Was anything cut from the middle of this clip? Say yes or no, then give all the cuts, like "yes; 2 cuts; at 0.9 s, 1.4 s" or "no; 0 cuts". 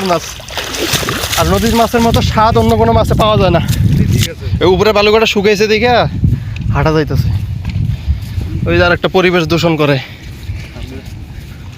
yes; 1 cut; at 4.3 s